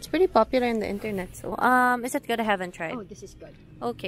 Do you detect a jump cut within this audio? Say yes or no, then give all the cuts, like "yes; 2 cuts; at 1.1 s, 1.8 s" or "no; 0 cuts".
yes; 1 cut; at 1.6 s